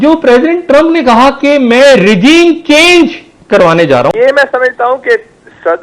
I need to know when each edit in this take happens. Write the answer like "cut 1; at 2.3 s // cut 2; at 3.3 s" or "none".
cut 1; at 4.1 s